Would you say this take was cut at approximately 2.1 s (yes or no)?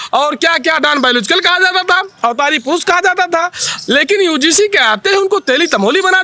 no